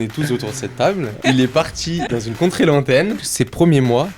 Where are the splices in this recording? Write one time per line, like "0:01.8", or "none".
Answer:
0:01.2
0:02.1
0:03.2